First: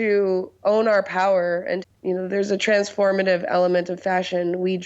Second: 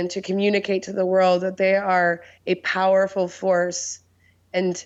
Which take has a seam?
first; 1 cut; at 1.9 s

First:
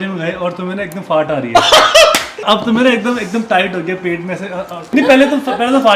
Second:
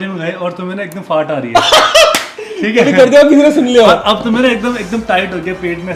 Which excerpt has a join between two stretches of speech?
first; 2 cuts; at 2.4 s, 4.9 s

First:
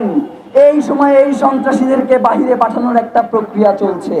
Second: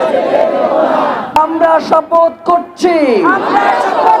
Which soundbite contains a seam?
second; 1 cut; at 1.4 s

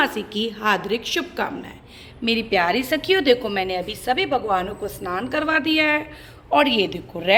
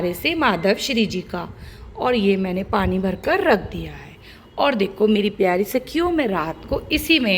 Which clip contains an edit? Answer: second; 1 cut; at 4.9 s

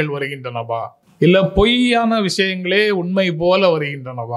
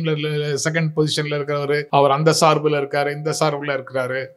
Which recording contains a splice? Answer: second; 1 cut; at 1.9 s

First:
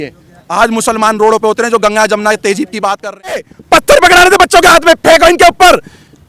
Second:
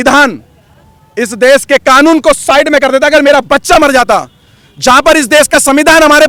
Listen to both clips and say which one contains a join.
first; 1 cut; at 3.5 s

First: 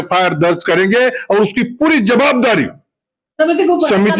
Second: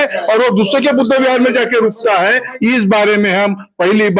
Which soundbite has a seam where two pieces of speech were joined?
second; 1 cut; at 2.5 s

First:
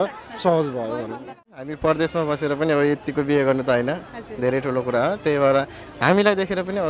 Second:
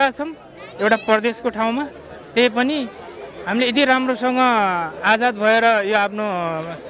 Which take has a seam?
first; 1 cut; at 1.7 s

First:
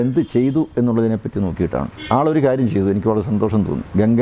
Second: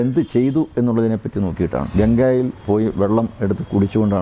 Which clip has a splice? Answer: second; 1 cut; at 1.9 s

